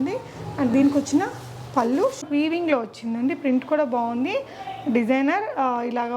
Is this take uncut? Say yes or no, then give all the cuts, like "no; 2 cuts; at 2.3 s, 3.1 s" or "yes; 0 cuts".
no; 1 cut; at 2.2 s